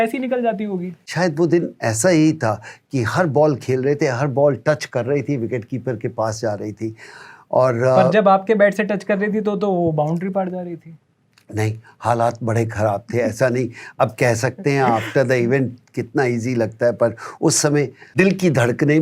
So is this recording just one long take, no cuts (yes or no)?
no